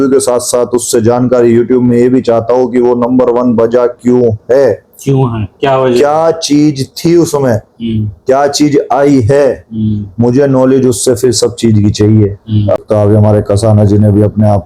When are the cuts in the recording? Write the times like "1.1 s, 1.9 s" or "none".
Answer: 12.8 s